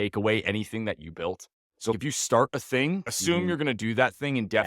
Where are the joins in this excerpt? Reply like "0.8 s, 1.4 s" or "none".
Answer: 1.9 s, 3.1 s